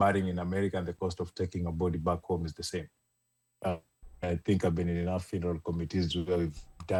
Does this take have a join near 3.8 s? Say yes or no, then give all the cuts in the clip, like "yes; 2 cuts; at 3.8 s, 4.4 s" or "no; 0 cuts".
no; 0 cuts